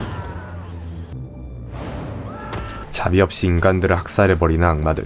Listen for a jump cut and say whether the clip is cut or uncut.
uncut